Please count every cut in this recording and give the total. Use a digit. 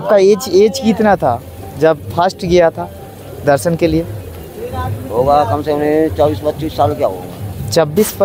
0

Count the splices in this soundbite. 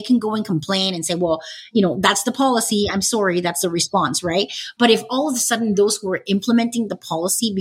0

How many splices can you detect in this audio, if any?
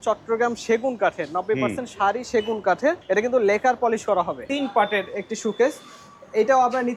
2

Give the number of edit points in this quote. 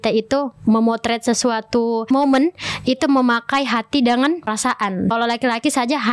2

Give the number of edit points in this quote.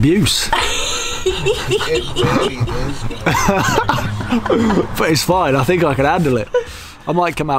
0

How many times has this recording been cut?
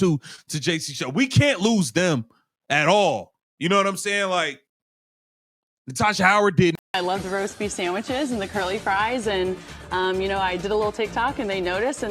1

